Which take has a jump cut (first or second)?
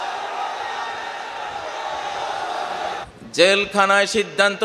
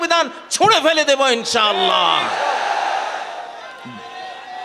first